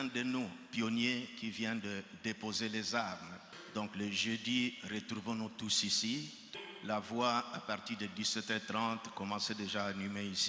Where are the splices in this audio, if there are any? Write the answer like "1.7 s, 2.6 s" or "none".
3.6 s, 6.5 s